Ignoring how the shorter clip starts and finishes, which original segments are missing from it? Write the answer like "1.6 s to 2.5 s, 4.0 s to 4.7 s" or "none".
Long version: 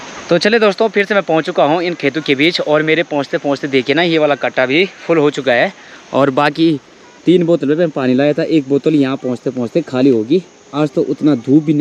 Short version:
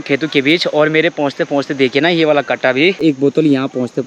4.9 s to 8.5 s